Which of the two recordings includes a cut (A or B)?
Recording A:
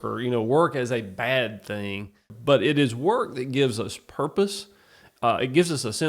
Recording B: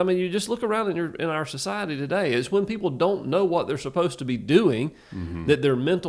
A